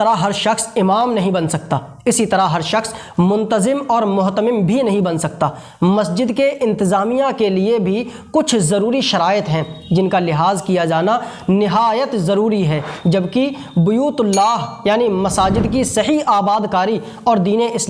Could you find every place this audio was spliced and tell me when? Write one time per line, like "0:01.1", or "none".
none